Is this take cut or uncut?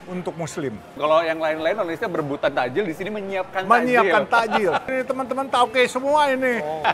uncut